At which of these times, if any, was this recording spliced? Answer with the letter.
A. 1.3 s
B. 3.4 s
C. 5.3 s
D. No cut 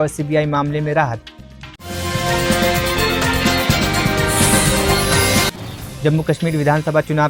D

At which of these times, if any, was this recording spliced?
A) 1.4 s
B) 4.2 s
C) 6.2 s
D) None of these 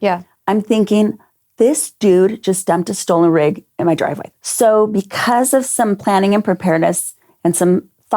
B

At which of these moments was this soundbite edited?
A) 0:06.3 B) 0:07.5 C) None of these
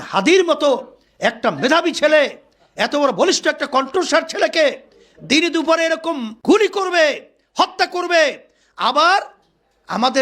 A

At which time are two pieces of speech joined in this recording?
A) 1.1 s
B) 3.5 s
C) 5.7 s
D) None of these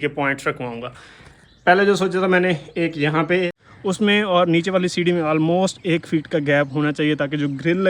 B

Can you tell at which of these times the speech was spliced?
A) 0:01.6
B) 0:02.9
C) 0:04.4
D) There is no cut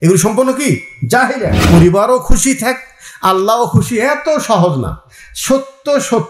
A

